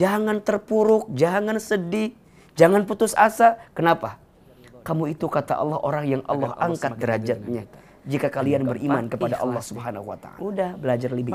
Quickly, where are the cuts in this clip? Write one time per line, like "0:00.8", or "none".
0:10.3

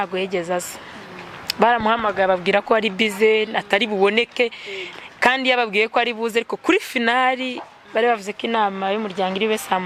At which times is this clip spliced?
none

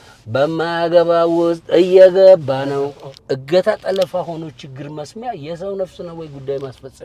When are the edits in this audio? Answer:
0:03.1

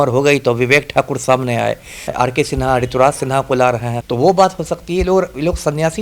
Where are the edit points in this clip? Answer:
0:02.1
0:04.0

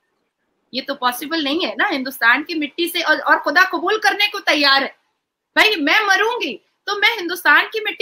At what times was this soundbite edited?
none

